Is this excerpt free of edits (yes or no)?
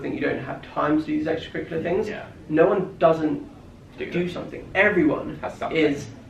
yes